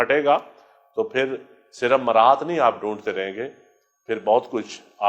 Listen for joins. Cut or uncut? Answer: uncut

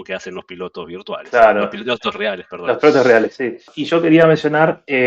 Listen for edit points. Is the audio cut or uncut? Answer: cut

